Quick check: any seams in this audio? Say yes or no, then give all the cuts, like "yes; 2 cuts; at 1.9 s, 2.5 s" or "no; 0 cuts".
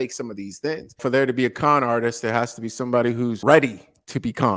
yes; 2 cuts; at 1.0 s, 3.4 s